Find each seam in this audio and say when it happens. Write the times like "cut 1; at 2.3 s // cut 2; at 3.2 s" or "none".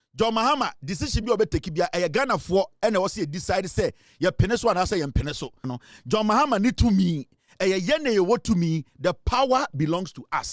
cut 1; at 5.7 s